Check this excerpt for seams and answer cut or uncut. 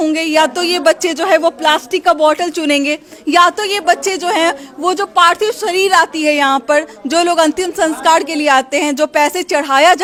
uncut